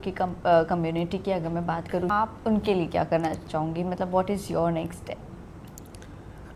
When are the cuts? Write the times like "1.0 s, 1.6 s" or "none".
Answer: 2.1 s, 3.4 s

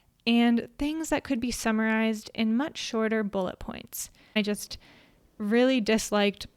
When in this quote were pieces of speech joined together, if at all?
4.4 s

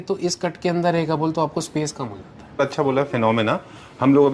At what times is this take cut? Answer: 2.6 s

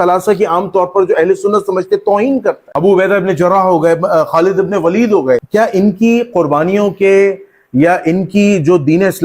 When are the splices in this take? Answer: 2.6 s, 5.5 s

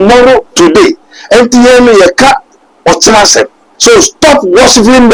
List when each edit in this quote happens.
3.6 s

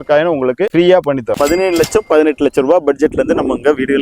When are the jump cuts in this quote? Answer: 1.3 s

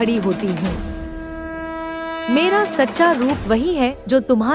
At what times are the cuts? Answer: 0.7 s, 2.3 s

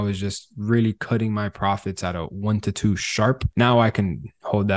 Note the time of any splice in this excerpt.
3.4 s

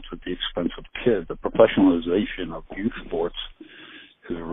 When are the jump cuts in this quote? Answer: 1.3 s

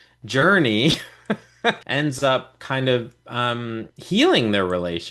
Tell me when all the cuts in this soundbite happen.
1.8 s

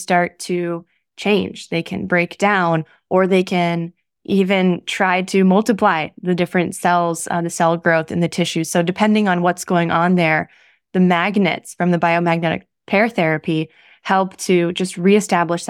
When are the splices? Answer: none

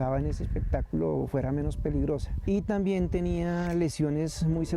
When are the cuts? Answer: 2.3 s

